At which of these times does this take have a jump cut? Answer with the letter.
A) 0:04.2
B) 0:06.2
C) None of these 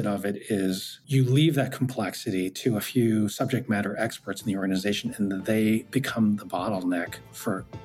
C